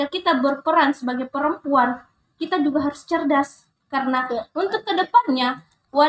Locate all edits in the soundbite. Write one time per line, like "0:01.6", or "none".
none